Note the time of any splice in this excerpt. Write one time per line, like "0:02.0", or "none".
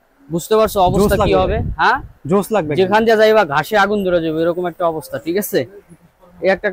none

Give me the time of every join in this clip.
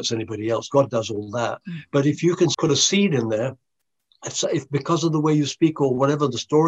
0:02.5

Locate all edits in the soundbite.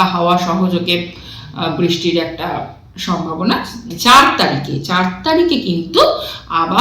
0:03.9

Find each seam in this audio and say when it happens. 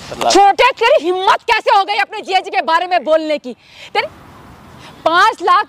0:04.0

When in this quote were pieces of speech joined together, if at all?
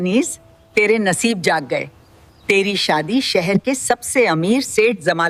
none

